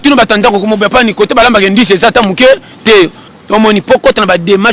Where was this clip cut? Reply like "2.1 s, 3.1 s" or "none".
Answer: 3.3 s